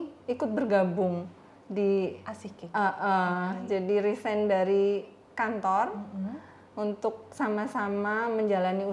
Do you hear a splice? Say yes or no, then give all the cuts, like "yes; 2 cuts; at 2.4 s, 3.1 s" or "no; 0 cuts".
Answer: no; 0 cuts